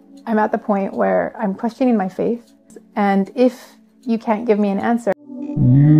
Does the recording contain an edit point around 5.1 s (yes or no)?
yes